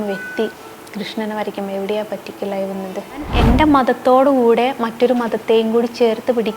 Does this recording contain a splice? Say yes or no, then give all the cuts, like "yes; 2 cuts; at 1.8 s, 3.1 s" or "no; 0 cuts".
yes; 1 cut; at 3.3 s